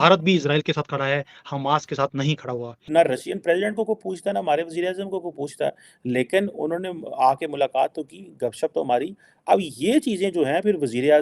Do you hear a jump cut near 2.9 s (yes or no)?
yes